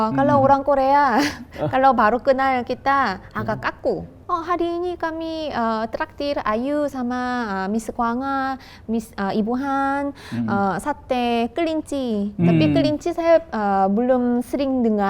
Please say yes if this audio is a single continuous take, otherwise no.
no